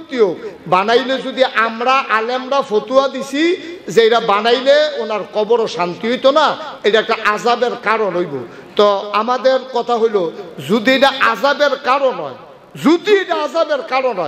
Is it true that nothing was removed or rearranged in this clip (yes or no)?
yes